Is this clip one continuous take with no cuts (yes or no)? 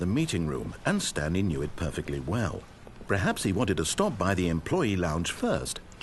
yes